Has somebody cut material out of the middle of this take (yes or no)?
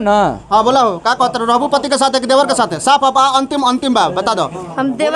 no